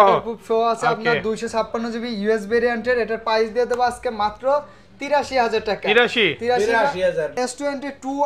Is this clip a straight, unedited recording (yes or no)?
no